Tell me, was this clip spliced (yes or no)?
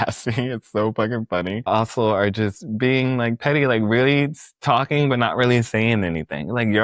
yes